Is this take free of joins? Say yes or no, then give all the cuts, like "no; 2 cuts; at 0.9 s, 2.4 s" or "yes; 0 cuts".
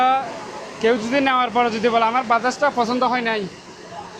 yes; 0 cuts